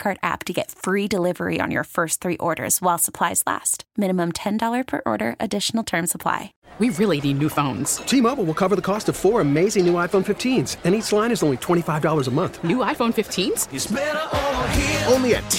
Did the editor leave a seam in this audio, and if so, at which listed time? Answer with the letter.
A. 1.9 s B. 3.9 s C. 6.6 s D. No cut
C